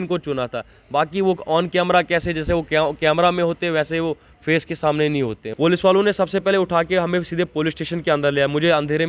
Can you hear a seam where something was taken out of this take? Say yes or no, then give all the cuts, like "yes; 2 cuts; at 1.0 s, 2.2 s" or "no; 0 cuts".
yes; 1 cut; at 5.4 s